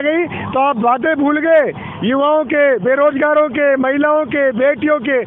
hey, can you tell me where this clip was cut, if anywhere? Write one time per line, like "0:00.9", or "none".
none